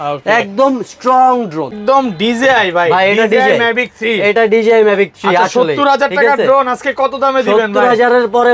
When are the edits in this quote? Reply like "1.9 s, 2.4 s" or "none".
1.8 s